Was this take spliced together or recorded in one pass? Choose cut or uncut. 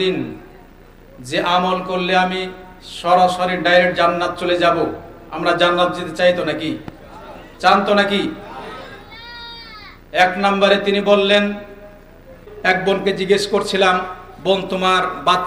cut